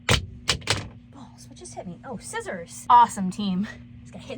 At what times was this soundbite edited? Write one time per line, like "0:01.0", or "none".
0:02.8